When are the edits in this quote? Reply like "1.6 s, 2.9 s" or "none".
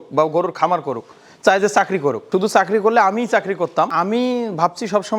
2.2 s, 3.9 s